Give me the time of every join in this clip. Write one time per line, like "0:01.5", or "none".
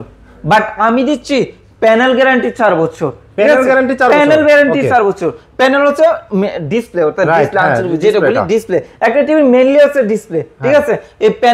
none

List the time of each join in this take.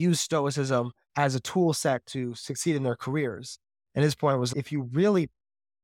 0:01.0
0:04.5

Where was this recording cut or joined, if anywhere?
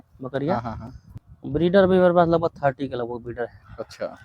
0:01.1

